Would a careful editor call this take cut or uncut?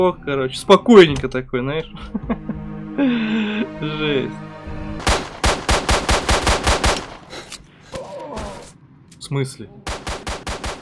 cut